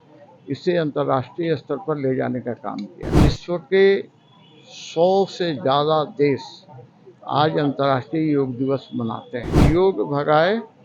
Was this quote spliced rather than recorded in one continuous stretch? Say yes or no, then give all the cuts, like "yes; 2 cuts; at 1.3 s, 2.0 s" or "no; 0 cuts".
yes; 2 cuts; at 3.2 s, 9.6 s